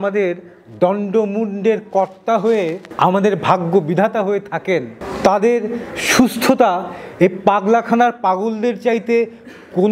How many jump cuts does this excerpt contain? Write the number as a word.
zero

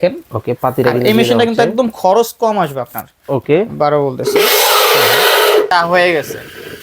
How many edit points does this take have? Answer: one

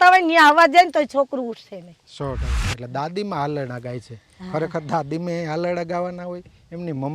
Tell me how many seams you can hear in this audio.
one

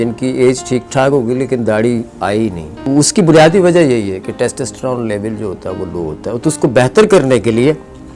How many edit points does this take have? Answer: one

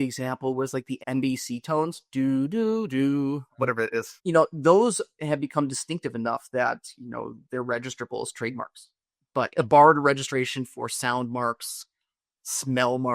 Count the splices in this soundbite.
two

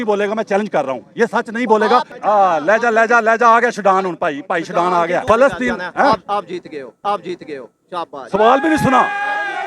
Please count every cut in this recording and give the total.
two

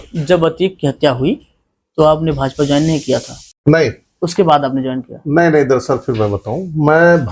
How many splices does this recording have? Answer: zero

